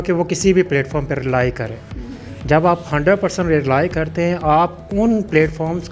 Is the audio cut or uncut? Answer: uncut